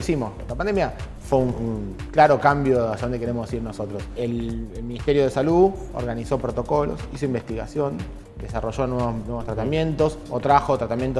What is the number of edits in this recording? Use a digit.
3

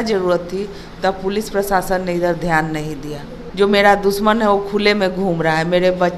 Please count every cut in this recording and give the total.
0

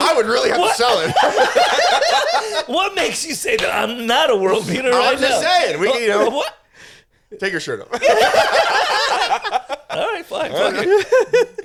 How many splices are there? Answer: 0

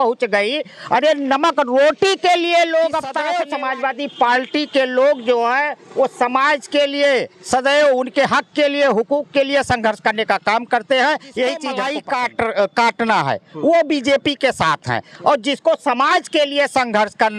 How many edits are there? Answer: 2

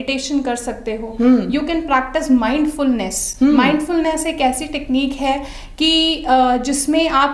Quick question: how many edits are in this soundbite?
0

